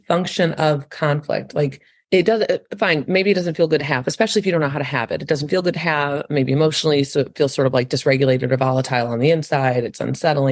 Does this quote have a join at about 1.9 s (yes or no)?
yes